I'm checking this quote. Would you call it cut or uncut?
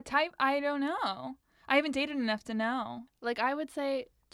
cut